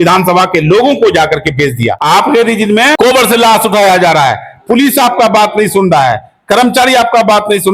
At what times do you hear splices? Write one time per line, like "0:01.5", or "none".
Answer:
0:02.0
0:03.0

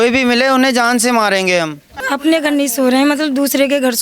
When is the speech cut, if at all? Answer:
0:02.0

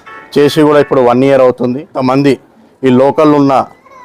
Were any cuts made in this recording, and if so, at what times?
0:02.0

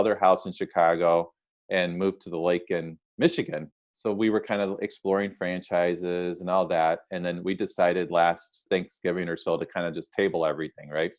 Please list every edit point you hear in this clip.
0:03.7
0:08.6

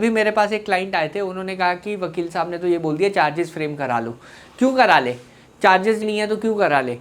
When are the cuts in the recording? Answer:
0:06.0

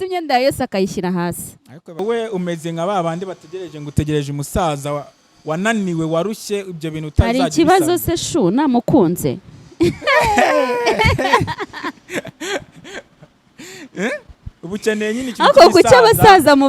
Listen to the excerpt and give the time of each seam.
0:02.0

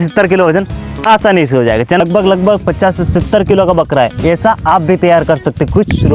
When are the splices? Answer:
0:02.0

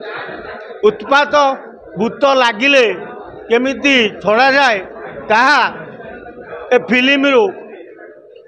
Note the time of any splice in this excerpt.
none

